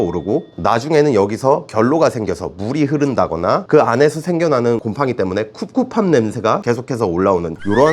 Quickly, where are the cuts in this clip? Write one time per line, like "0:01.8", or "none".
none